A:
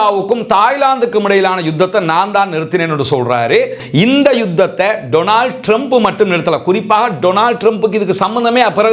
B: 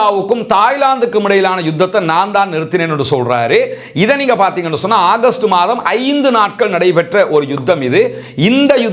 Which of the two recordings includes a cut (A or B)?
A